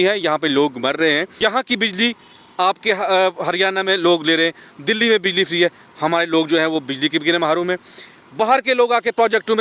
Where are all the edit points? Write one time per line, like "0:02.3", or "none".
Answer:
0:01.3